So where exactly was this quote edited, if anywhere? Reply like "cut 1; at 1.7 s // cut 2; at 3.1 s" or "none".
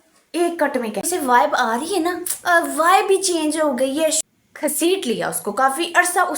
cut 1; at 1.0 s // cut 2; at 4.3 s